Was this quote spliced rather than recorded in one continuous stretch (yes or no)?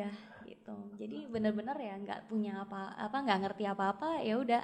no